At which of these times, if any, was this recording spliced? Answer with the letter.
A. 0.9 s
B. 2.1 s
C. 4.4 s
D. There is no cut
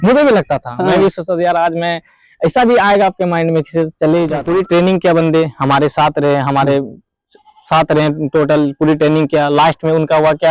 C